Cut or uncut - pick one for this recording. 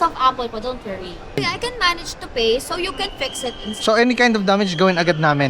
cut